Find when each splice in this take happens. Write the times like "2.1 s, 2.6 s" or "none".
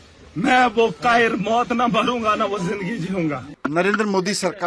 3.5 s